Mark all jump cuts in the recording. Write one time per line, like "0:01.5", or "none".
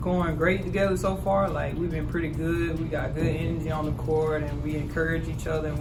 none